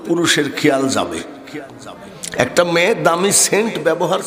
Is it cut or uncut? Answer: uncut